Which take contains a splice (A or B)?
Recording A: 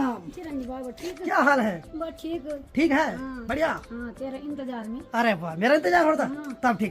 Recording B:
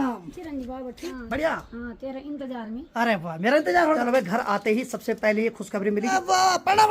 B